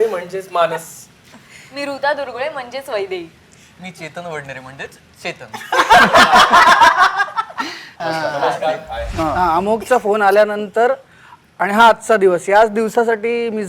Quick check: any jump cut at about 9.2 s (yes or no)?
yes